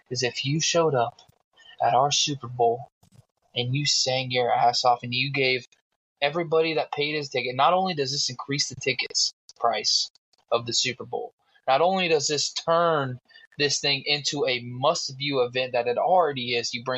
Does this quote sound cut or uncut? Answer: uncut